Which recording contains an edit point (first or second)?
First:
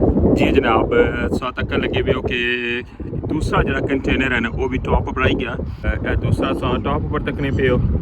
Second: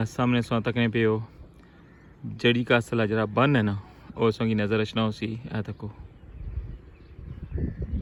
first